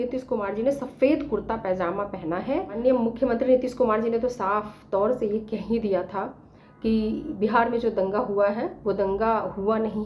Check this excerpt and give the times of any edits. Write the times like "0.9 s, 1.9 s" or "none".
2.8 s